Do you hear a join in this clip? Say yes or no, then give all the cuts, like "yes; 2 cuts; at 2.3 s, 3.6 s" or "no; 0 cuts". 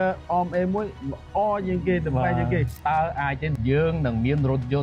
yes; 2 cuts; at 2.7 s, 3.6 s